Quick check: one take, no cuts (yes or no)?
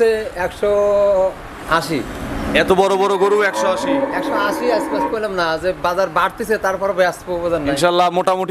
yes